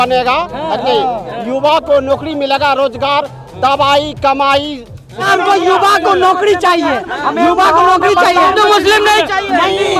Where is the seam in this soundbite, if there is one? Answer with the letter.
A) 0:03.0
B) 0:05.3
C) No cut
B